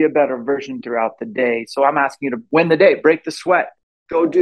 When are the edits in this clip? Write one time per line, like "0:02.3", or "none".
0:02.4